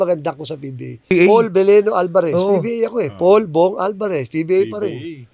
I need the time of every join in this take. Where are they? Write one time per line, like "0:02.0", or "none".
0:01.1